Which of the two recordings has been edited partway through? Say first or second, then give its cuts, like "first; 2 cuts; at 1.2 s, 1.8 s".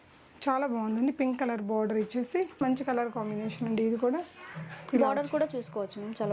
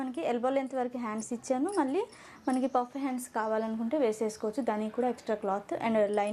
first; 1 cut; at 2.6 s